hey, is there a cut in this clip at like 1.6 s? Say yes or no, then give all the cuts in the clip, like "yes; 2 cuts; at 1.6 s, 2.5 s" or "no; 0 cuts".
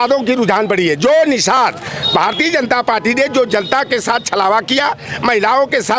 yes; 1 cut; at 1.6 s